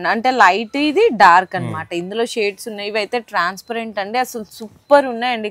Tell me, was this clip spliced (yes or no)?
no